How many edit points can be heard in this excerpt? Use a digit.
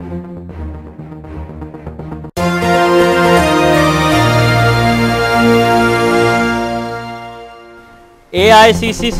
0